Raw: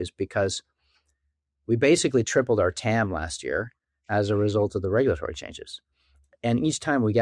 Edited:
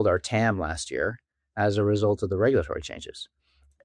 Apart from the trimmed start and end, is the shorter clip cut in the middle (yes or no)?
no